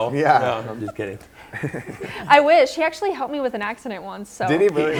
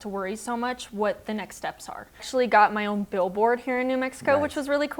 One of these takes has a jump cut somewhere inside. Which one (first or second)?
second